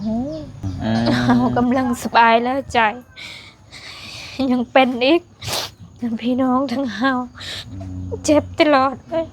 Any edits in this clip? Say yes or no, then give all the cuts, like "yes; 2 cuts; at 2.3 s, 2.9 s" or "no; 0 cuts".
yes; 1 cut; at 1.3 s